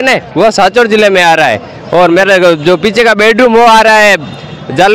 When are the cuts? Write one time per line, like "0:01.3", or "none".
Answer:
none